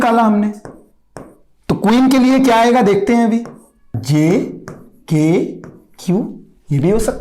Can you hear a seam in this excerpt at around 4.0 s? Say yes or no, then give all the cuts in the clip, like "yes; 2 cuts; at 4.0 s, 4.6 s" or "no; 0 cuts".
yes; 1 cut; at 4.0 s